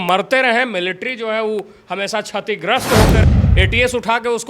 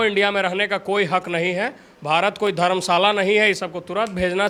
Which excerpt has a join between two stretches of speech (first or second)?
first